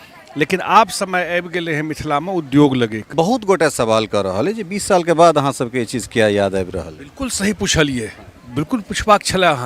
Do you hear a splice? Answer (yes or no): yes